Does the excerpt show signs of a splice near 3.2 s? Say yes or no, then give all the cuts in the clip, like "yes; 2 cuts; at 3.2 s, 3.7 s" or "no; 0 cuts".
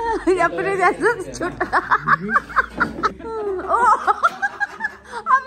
yes; 1 cut; at 3.2 s